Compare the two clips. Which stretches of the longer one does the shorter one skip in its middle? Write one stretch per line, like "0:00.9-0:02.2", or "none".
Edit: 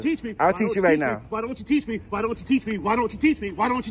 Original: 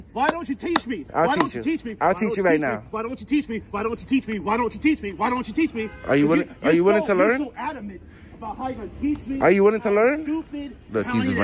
none